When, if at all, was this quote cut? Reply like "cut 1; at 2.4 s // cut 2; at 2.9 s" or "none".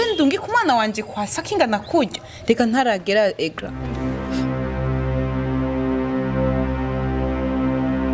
cut 1; at 3.9 s